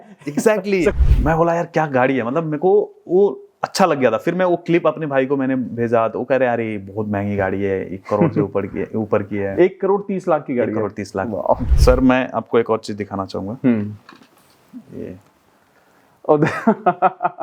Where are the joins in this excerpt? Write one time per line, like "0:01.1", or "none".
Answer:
0:01.0
0:11.6